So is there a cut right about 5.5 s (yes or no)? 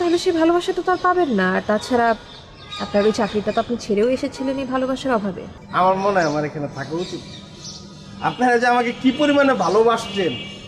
yes